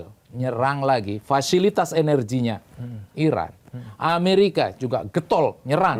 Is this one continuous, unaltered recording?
yes; 0 cuts

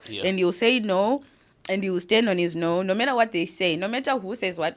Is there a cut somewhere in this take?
no; 0 cuts

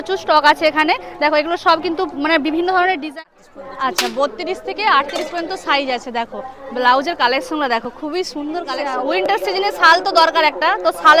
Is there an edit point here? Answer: yes; 2 cuts; at 3.1 s, 8.8 s

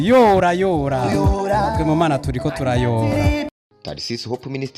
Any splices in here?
yes; 1 cut; at 3.5 s

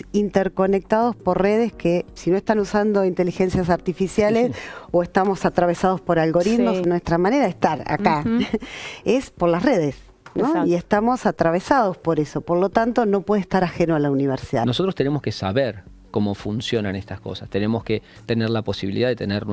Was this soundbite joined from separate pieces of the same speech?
yes; 3 cuts; at 2.2 s, 6.8 s, 14.6 s

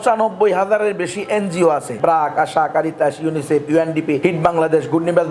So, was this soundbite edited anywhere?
yes; 2 cuts; at 1.9 s, 4.2 s

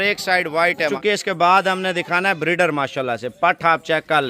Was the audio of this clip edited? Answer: yes; 1 cut; at 1.0 s

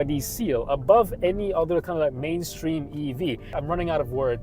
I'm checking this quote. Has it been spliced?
yes; 1 cut; at 3.5 s

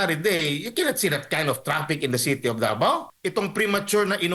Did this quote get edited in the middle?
yes; 1 cut; at 3.1 s

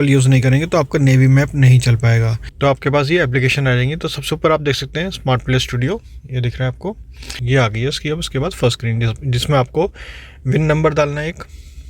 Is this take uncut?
no; 2 cuts; at 2.4 s, 7.4 s

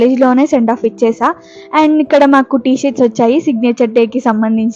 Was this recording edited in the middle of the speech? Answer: no; 0 cuts

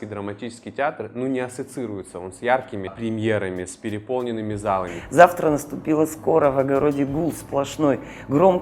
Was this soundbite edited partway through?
yes; 2 cuts; at 3.0 s, 5.0 s

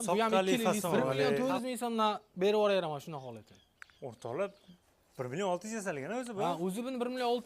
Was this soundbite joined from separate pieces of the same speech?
yes; 1 cut; at 1.4 s

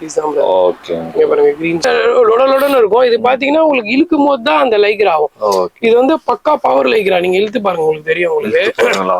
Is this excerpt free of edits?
no; 1 cut; at 1.8 s

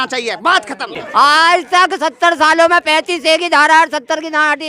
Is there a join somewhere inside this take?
yes; 1 cut; at 0.9 s

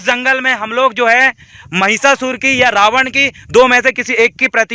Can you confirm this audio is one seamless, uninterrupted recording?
yes; 0 cuts

